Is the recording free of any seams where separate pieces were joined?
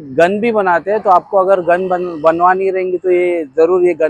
yes; 0 cuts

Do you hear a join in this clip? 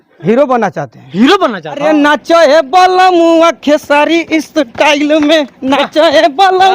yes; 1 cut; at 1.8 s

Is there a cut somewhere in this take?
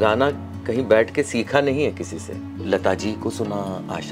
yes; 1 cut; at 2.6 s

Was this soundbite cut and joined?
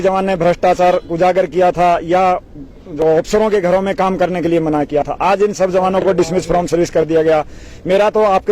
no; 0 cuts

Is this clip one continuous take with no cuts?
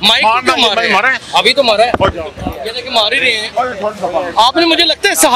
yes; 0 cuts

